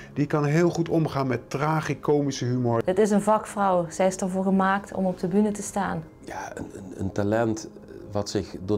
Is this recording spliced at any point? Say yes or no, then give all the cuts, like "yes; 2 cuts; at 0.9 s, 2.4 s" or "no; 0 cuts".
yes; 2 cuts; at 2.8 s, 6.1 s